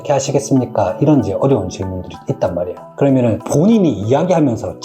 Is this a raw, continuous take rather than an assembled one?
no; 1 cut; at 2.8 s

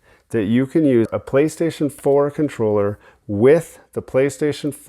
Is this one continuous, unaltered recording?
no; 1 cut; at 1.1 s

